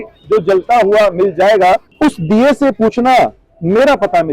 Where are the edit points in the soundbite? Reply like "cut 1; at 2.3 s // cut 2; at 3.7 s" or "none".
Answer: cut 1; at 1.9 s

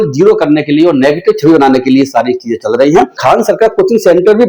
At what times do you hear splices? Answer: cut 1; at 3.1 s

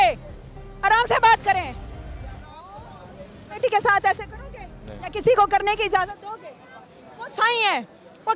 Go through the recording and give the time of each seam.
cut 1; at 3.6 s

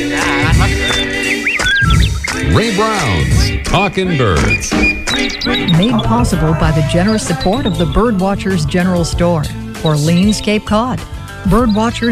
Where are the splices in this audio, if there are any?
none

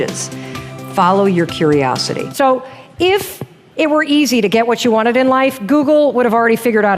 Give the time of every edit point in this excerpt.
cut 1; at 2.3 s

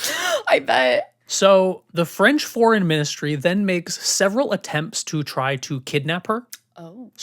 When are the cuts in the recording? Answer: cut 1; at 1.2 s // cut 2; at 1.8 s

